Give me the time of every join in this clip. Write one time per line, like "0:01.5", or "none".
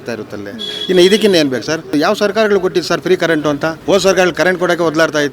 0:01.9
0:03.8